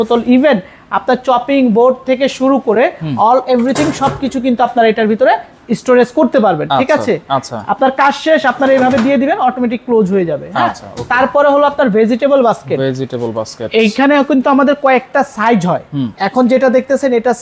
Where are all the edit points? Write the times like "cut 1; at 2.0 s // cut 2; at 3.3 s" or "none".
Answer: none